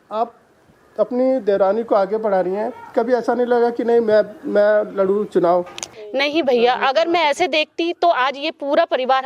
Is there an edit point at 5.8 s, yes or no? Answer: yes